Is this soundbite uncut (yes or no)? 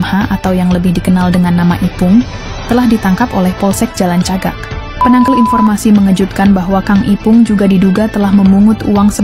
no